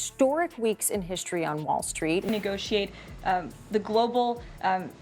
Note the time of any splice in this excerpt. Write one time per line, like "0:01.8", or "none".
0:02.2